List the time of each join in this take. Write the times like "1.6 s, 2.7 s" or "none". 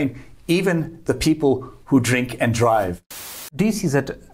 3.1 s